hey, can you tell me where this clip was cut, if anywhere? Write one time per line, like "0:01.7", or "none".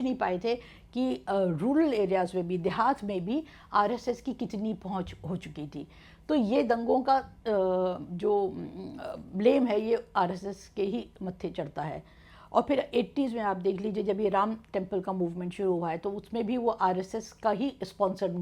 none